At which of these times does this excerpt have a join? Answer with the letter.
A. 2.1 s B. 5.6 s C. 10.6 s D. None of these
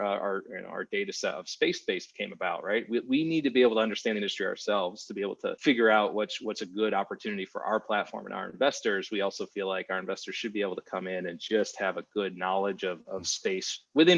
B